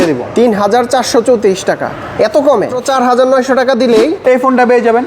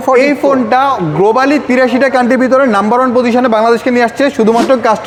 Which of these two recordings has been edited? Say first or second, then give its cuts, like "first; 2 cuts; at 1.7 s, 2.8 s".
first; 2 cuts; at 2.8 s, 4.2 s